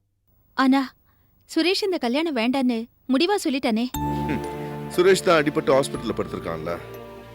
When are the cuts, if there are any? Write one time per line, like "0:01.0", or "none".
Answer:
none